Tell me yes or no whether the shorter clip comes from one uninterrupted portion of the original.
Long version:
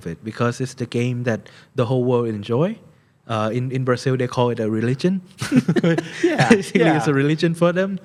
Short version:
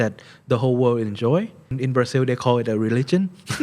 no